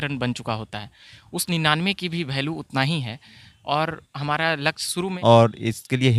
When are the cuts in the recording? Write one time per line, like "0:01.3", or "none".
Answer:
0:05.1